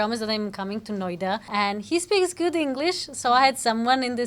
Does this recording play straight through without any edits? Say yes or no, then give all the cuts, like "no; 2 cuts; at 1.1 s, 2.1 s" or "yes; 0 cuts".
no; 1 cut; at 1.5 s